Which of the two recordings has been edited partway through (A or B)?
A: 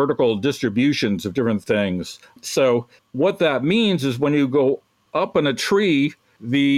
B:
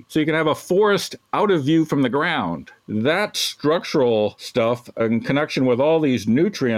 B